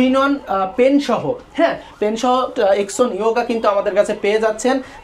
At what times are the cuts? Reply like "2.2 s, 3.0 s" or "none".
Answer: none